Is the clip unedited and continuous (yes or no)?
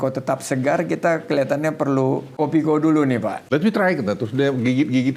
no